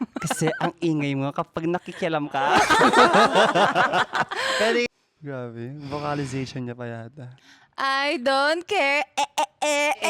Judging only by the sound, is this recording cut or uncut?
cut